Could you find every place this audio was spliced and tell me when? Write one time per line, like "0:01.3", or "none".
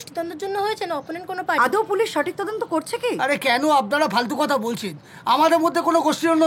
none